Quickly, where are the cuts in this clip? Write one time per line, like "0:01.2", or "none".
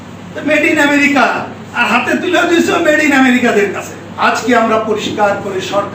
0:04.0